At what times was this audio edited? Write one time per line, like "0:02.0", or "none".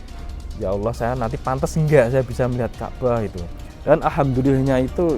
none